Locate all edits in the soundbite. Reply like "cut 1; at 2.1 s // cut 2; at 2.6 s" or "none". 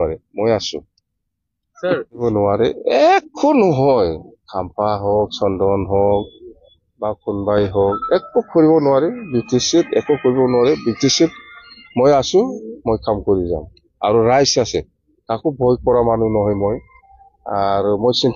cut 1; at 2.2 s